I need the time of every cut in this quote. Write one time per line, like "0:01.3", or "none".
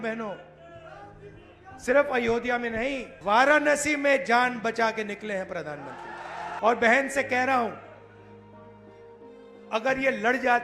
0:03.1
0:06.5